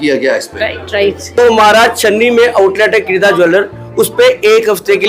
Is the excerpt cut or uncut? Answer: cut